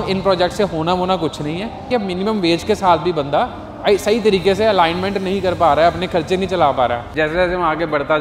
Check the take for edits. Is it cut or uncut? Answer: cut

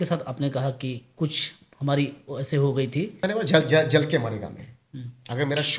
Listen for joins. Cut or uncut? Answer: cut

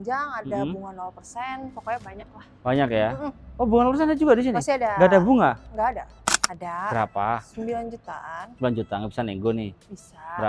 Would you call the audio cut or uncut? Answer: cut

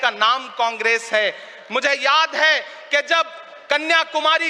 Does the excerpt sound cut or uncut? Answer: uncut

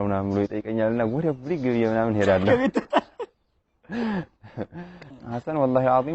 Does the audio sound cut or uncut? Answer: cut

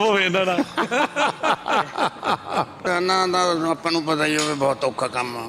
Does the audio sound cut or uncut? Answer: cut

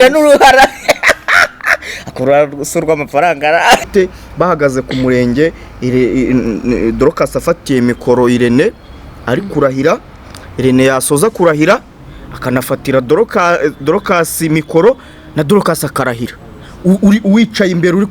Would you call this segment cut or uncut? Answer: cut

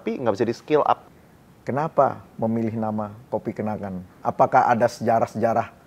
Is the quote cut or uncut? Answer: cut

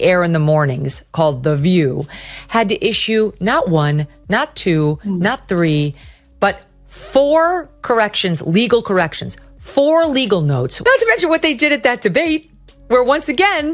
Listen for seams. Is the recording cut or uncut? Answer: cut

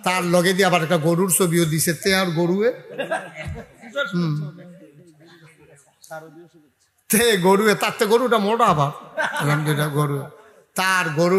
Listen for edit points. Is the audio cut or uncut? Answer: uncut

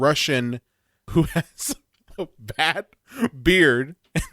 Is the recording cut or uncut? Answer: cut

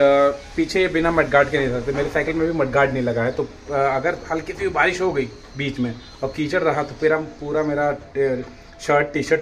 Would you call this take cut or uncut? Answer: uncut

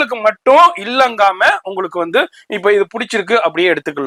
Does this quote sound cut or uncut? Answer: uncut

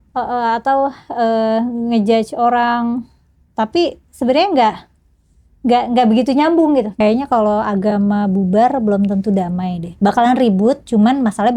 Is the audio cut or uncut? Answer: cut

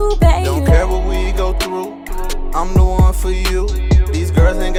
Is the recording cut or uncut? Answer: uncut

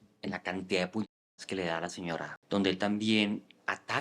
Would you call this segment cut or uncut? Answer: cut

